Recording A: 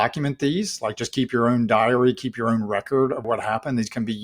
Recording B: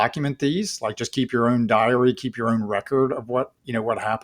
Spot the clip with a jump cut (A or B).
A